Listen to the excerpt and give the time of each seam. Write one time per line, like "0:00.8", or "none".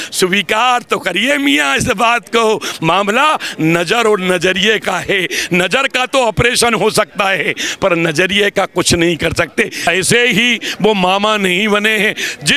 0:09.8